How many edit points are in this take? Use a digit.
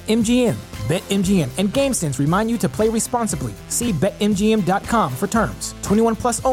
0